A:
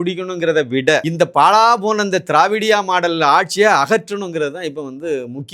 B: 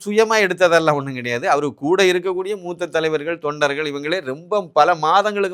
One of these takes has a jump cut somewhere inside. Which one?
A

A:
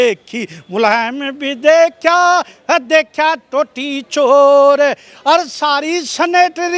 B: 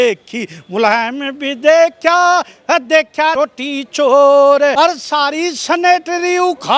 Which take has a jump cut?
B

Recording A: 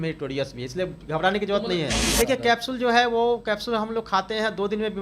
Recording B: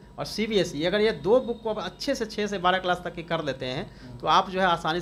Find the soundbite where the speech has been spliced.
A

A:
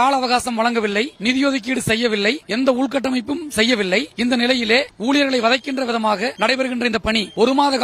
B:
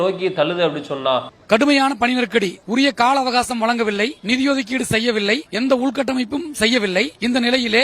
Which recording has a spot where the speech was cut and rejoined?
B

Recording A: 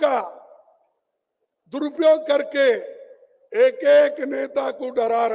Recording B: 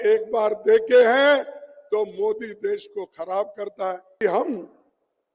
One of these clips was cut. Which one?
B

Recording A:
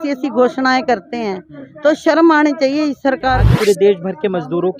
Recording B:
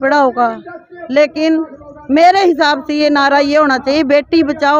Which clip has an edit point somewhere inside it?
A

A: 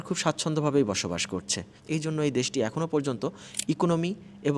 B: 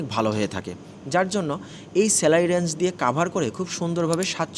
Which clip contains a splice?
A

